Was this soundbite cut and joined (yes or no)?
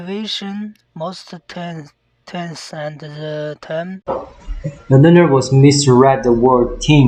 no